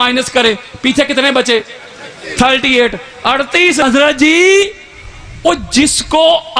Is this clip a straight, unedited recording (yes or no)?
no